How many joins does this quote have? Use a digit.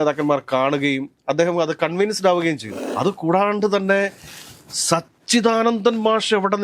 1